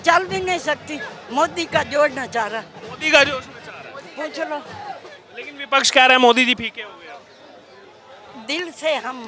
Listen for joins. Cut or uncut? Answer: uncut